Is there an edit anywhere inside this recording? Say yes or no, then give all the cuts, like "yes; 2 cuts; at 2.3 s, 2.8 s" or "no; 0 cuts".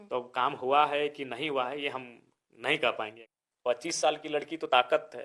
yes; 1 cut; at 3.2 s